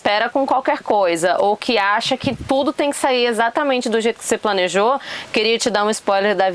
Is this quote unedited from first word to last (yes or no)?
yes